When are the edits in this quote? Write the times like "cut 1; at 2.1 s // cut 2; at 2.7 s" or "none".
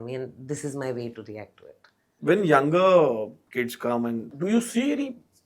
cut 1; at 2.1 s // cut 2; at 3.4 s // cut 3; at 4.3 s